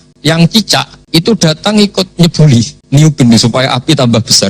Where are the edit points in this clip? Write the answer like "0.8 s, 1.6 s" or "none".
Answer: 1.0 s, 2.8 s